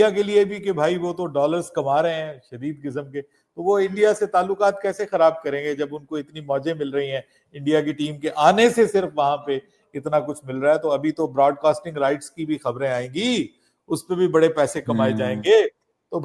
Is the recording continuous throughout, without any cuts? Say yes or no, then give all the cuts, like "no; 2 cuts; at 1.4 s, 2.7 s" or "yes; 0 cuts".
yes; 0 cuts